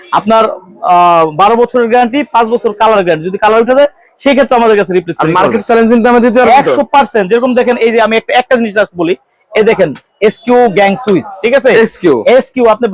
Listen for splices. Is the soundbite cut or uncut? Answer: uncut